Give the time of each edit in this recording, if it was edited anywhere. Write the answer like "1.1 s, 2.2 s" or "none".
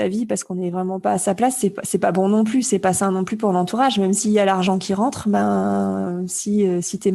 none